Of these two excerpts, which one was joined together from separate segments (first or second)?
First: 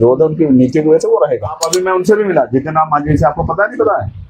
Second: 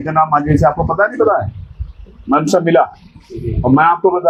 first